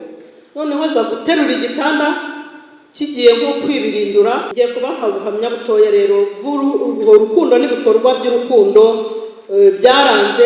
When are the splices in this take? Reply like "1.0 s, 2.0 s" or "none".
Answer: 4.5 s